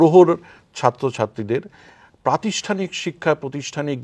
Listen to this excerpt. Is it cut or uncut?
uncut